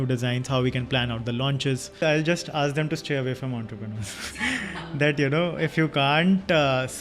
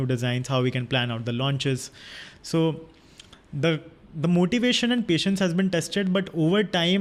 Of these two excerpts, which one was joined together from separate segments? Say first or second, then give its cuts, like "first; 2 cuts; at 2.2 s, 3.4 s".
first; 1 cut; at 2.0 s